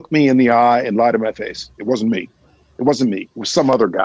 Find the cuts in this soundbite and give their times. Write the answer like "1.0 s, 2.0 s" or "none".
none